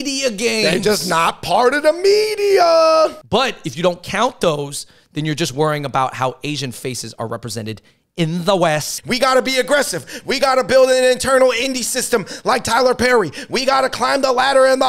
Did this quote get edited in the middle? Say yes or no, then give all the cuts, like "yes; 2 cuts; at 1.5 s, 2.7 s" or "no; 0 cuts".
yes; 2 cuts; at 3.2 s, 8.9 s